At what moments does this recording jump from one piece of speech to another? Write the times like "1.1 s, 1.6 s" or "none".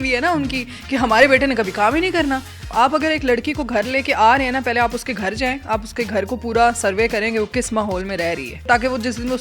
2.6 s, 8.7 s

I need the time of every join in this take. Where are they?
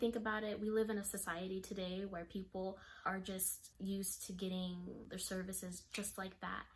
3.3 s, 5.0 s

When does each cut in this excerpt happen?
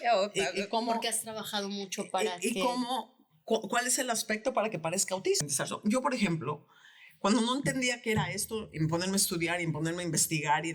5.4 s

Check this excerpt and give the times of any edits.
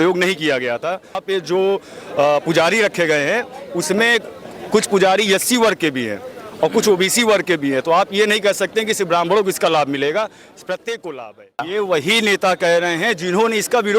1.2 s, 11.6 s

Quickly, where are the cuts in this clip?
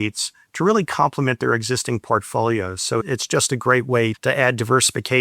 3.0 s, 4.2 s

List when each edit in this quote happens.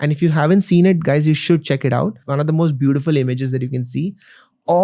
2.2 s

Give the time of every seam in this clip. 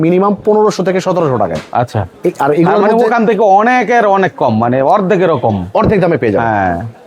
none

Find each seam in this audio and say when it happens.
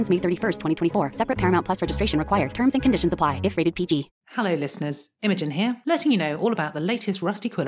4.2 s

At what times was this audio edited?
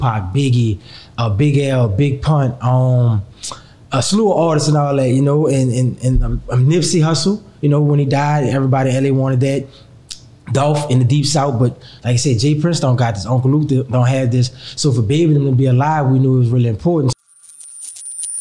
17.2 s

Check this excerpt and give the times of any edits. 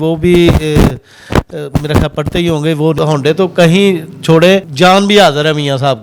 3.0 s, 4.7 s

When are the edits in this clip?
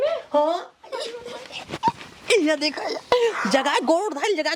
none

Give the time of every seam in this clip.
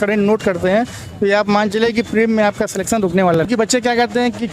3.3 s

